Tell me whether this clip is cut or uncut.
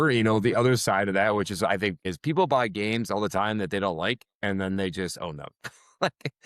cut